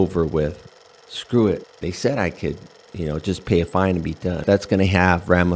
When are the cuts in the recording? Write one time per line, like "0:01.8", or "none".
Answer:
0:04.4